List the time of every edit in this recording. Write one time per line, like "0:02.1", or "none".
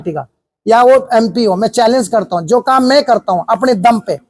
none